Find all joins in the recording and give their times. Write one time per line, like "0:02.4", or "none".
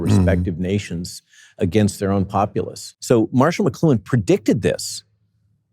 0:02.9